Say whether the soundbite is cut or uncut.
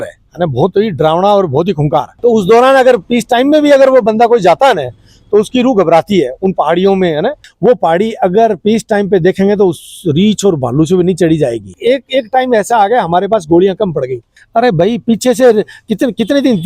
cut